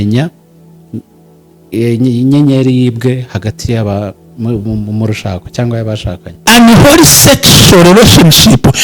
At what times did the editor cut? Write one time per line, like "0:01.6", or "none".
0:06.4